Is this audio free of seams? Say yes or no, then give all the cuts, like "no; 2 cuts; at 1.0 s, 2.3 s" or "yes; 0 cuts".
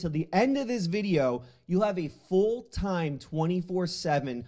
yes; 0 cuts